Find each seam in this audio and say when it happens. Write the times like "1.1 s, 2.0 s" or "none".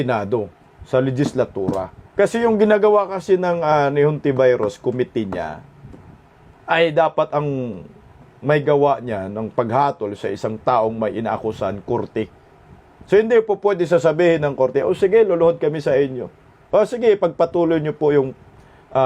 1.9 s

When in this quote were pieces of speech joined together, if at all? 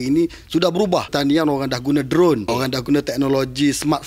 1.1 s, 2.5 s

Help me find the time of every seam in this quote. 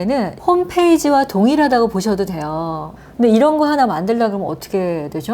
2.9 s

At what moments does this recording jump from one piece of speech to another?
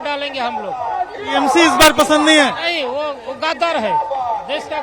none

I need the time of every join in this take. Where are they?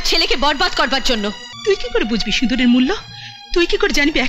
1.5 s

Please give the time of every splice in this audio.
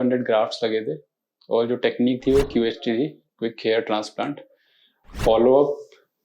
5.1 s

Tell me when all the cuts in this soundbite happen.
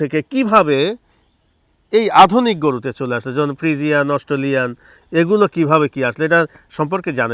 none

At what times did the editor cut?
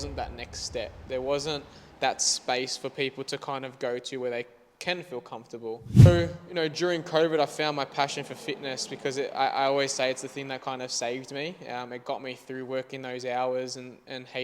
6.1 s

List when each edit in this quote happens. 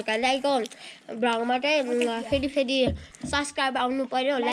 none

